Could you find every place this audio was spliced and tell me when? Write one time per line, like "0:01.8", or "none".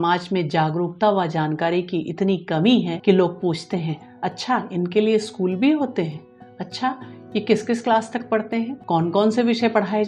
0:02.9
0:08.8